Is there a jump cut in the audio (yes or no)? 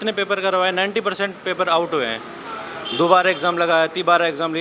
no